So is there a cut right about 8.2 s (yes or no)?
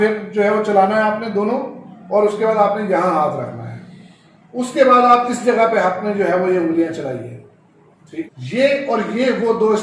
yes